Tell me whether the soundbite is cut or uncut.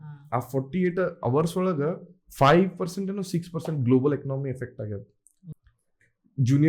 cut